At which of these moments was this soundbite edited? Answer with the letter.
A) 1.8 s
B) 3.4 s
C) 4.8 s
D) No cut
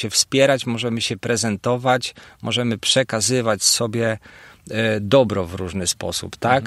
D